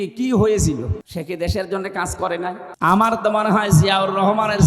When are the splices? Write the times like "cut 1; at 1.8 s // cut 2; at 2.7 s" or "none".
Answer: cut 1; at 1.0 s // cut 2; at 2.7 s